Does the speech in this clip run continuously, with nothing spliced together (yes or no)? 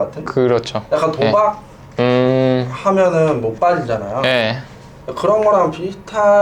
yes